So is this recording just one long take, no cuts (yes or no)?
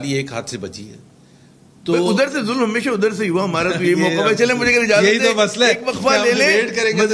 yes